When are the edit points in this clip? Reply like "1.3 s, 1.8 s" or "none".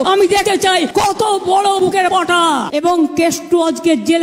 2.7 s